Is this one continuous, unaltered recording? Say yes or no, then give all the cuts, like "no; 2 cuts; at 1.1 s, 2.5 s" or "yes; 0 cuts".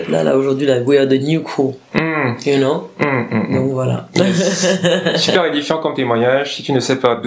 yes; 0 cuts